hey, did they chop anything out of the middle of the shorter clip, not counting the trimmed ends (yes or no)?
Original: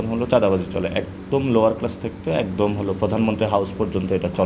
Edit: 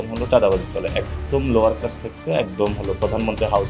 no